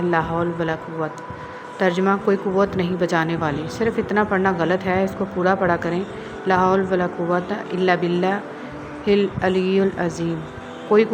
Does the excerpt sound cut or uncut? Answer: uncut